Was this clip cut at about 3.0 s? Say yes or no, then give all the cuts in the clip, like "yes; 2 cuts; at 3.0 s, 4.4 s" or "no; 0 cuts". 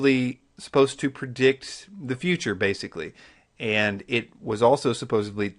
yes; 1 cut; at 3.0 s